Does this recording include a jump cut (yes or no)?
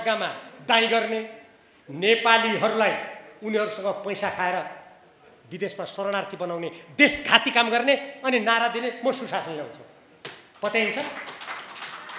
no